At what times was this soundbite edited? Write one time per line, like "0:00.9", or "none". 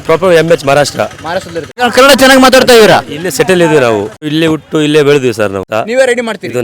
0:01.7
0:04.3
0:05.7